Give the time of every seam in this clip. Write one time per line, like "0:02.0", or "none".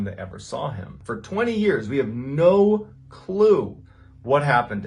0:01.0